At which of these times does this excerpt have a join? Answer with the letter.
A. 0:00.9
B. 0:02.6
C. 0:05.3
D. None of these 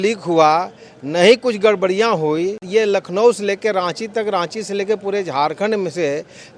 B